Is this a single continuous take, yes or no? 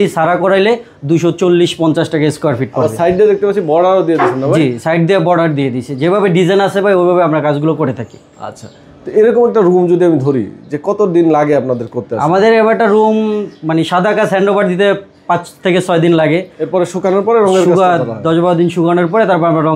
yes